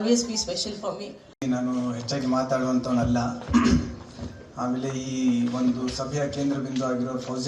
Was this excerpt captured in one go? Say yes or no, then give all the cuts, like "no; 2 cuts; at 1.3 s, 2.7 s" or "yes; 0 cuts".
no; 1 cut; at 1.3 s